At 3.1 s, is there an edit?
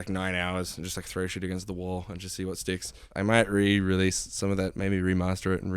yes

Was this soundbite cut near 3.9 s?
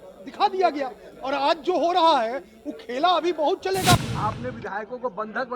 yes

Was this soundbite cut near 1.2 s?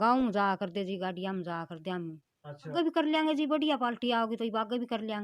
no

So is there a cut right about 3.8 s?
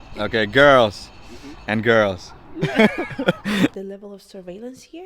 yes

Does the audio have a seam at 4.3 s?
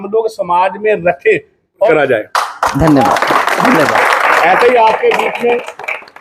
no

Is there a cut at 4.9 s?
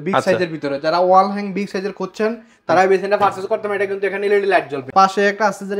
yes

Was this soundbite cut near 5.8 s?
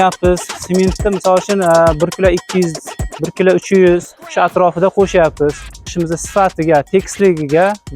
yes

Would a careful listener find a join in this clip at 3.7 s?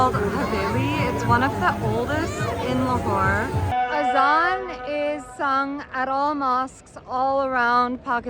yes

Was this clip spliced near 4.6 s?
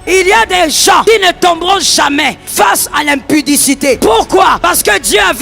yes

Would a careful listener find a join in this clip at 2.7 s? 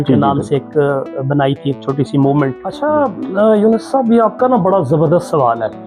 yes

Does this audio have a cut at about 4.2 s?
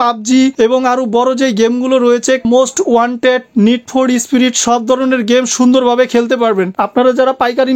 no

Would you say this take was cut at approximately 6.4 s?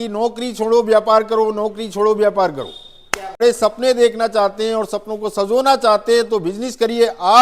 no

